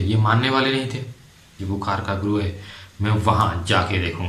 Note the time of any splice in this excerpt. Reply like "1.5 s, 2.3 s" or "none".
1.5 s